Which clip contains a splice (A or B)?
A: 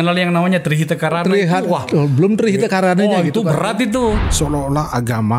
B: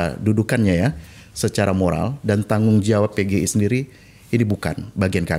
A